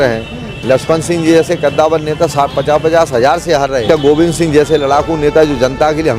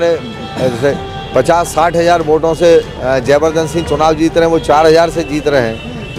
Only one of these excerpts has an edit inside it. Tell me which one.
first; 1 cut; at 3.8 s

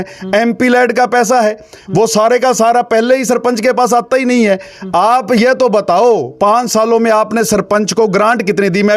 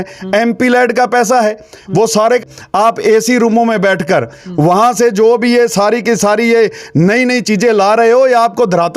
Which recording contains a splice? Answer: second; 1 cut; at 2.4 s

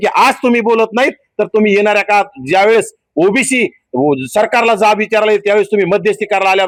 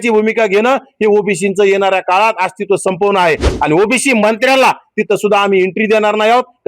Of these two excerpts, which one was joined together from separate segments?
second; 1 cut; at 3.5 s

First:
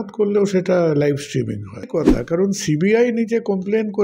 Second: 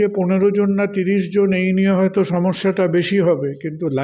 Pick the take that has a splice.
first; 1 cut; at 1.9 s

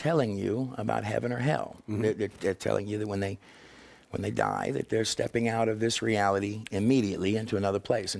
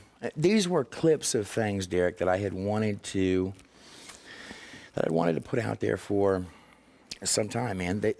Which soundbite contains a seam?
second; 1 cut; at 4.1 s

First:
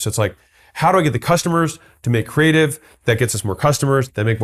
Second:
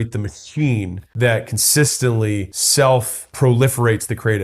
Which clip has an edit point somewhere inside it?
second; 3 cuts; at 1.0 s, 2.6 s, 3.2 s

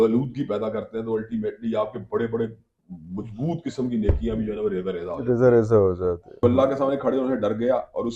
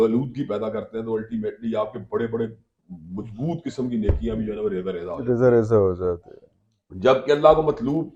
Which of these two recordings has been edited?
first; 1 cut; at 6.4 s

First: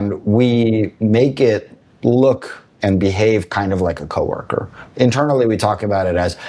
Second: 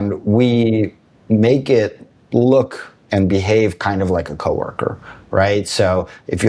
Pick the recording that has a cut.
first; 2 cuts; at 0.9 s, 4.9 s

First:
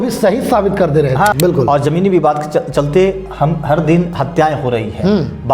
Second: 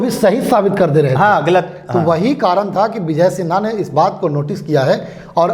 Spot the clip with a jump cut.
first; 1 cut; at 1.3 s

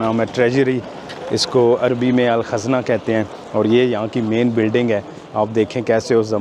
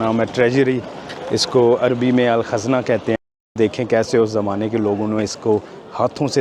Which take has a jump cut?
second; 1 cut; at 3.4 s

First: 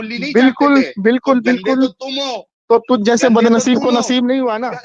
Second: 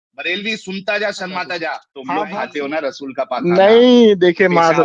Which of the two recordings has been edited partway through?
second; 1 cut; at 1.9 s

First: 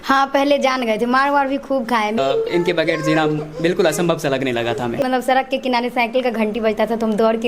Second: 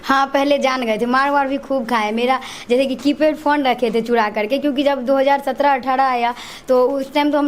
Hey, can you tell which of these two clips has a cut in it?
first; 2 cuts; at 2.2 s, 5.0 s

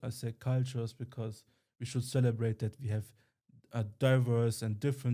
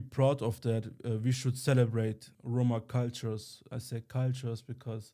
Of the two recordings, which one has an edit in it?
second; 1 cut; at 2.3 s

